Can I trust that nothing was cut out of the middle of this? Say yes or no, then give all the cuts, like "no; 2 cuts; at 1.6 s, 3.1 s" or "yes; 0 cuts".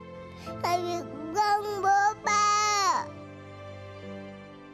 yes; 0 cuts